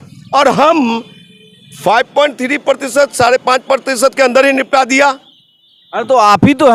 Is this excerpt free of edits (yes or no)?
yes